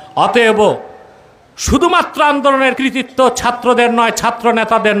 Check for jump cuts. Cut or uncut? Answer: cut